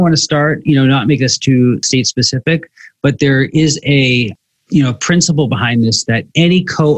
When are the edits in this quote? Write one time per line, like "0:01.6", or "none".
0:01.8

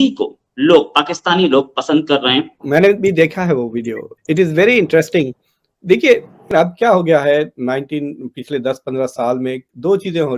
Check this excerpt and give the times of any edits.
0:02.5
0:06.3

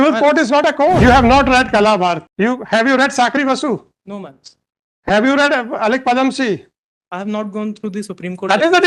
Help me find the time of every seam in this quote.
0:01.0
0:02.3

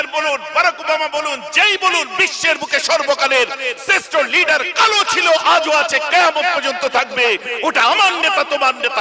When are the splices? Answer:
none

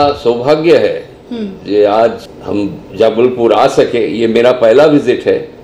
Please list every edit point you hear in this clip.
0:02.3

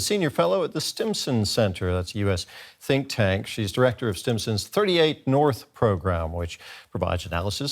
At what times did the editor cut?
none

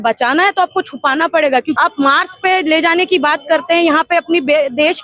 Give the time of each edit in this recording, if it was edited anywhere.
0:01.8

